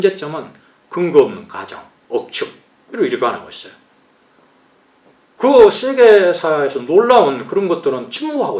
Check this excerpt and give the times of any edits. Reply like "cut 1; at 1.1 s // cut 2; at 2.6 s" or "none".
none